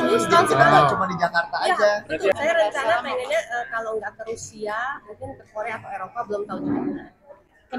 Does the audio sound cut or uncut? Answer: cut